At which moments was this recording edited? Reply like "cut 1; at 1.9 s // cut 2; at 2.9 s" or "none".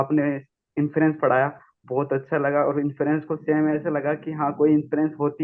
none